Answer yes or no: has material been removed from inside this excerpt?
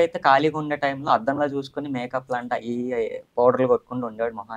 no